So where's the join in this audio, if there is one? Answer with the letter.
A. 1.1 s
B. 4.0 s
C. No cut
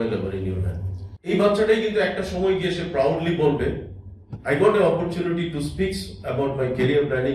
A